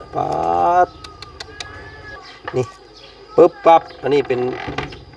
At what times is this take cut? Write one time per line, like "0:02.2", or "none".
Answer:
0:02.2